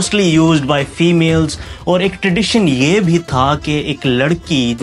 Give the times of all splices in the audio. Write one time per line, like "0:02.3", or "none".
none